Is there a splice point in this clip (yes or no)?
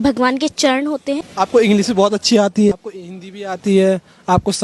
yes